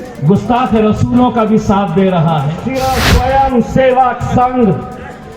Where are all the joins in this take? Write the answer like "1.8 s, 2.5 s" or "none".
2.6 s